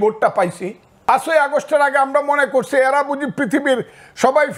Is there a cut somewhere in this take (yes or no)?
yes